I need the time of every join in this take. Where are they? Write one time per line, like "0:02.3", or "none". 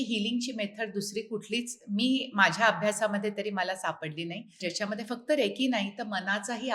0:04.6